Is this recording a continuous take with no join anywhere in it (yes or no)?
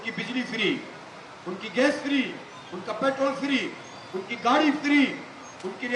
yes